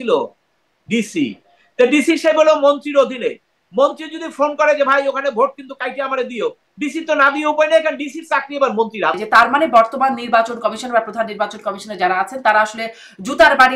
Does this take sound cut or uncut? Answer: cut